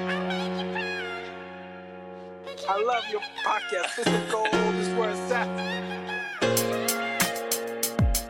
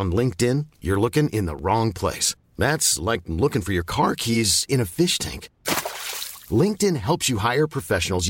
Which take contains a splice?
first; 1 cut; at 1.6 s

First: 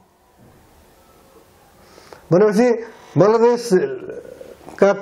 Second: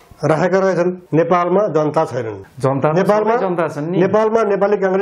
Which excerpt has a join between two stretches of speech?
second; 2 cuts; at 1.0 s, 2.4 s

